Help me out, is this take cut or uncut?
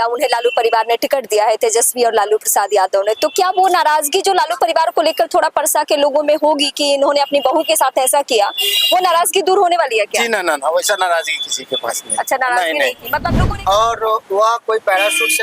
cut